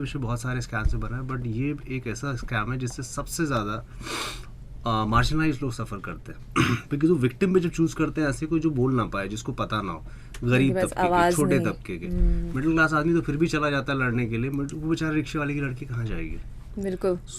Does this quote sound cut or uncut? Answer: uncut